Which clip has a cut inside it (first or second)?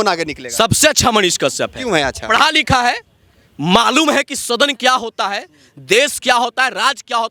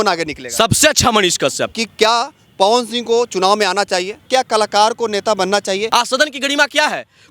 second